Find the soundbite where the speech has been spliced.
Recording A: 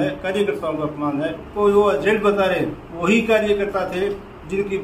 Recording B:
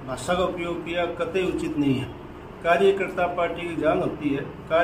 A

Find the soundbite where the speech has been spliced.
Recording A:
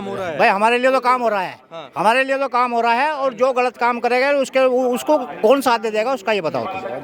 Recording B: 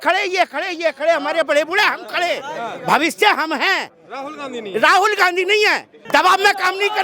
B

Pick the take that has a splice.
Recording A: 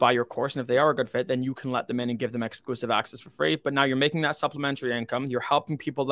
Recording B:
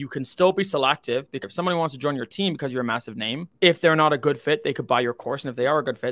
B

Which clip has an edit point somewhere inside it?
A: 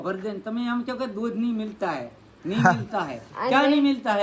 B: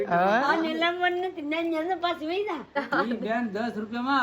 B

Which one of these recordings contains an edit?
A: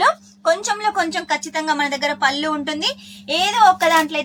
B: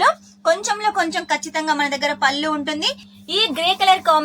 B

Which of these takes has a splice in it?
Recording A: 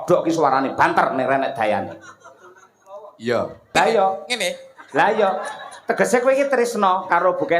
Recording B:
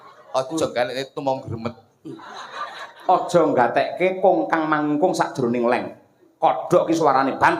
A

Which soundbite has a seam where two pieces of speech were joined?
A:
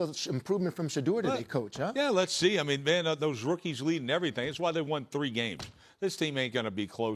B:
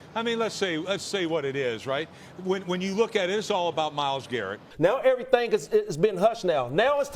B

